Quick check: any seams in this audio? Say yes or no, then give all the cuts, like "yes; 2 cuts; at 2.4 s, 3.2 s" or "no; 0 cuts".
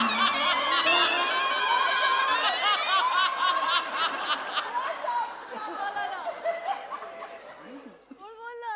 no; 0 cuts